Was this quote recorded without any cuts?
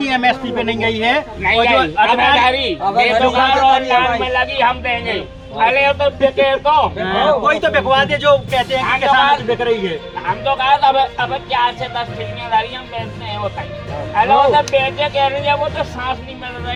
yes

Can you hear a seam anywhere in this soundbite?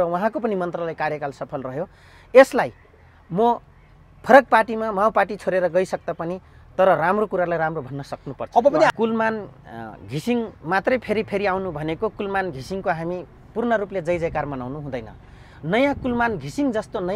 yes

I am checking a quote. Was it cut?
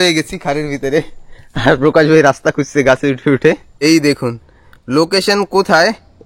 yes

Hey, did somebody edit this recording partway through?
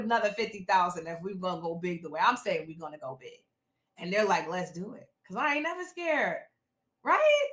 no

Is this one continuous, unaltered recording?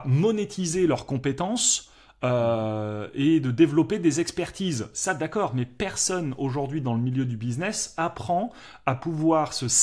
yes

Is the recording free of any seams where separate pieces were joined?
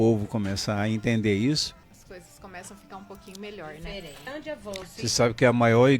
no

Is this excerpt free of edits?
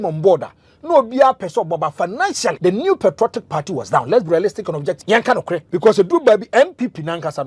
no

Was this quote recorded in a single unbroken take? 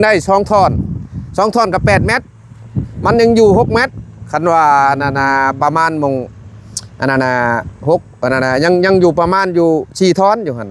yes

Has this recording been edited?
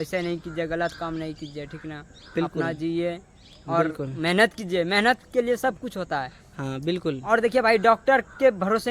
no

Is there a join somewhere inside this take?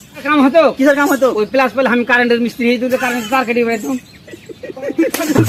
no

